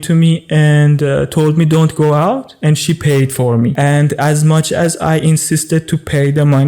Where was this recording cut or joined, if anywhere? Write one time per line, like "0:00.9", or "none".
0:03.7